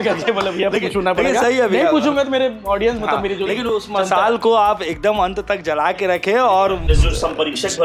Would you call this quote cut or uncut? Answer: cut